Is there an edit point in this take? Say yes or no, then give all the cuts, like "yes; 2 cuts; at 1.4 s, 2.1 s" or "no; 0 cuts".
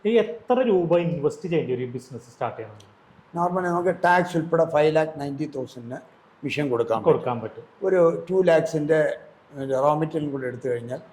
no; 0 cuts